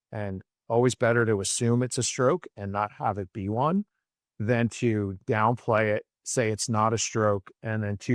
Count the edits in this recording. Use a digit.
0